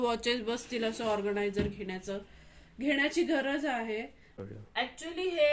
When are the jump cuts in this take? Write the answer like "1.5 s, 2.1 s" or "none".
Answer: 4.4 s